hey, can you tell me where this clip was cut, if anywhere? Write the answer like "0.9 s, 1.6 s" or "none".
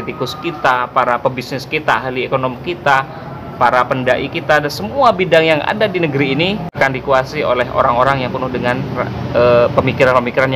6.8 s